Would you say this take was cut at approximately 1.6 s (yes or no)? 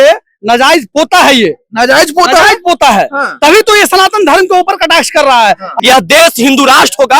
no